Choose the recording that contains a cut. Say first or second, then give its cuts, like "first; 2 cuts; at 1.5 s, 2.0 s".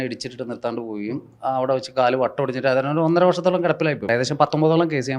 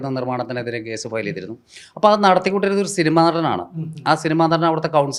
first; 1 cut; at 4.1 s